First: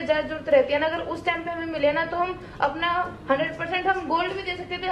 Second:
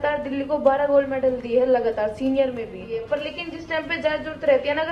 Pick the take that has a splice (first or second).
second